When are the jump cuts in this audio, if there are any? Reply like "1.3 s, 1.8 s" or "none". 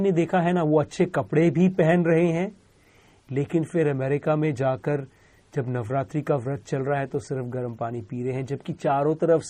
none